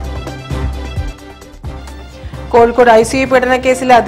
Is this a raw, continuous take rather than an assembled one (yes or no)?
yes